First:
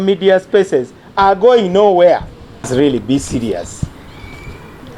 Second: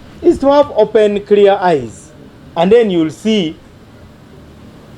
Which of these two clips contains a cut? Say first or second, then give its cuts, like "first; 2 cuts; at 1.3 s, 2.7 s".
first; 1 cut; at 2.7 s